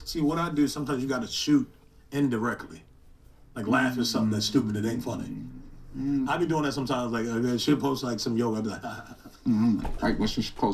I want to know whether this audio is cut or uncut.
uncut